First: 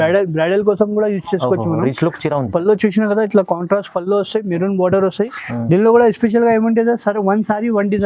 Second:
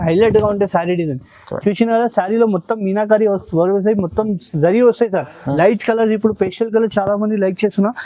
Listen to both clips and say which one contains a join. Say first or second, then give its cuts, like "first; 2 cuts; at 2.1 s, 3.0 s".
second; 1 cut; at 5.5 s